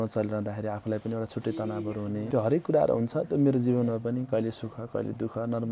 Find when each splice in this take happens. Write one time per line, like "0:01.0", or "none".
0:02.3